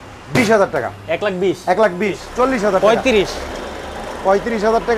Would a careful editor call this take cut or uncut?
cut